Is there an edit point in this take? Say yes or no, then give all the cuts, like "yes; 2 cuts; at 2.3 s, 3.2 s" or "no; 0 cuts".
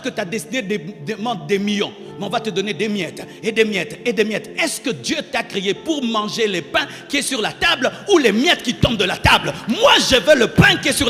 no; 0 cuts